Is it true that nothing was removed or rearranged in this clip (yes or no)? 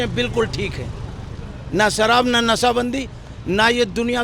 yes